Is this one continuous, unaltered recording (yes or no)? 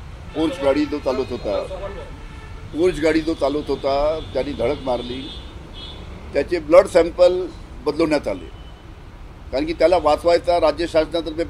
yes